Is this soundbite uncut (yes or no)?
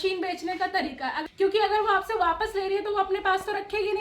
no